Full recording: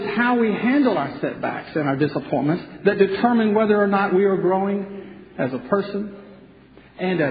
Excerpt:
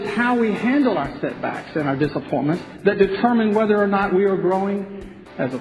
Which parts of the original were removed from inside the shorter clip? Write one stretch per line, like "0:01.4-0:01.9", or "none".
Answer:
none